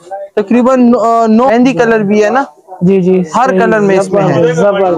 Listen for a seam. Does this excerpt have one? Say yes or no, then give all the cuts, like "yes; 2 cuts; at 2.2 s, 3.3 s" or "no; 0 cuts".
yes; 1 cut; at 1.5 s